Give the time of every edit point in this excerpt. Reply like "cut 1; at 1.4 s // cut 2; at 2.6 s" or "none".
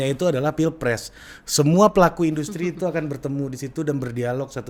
none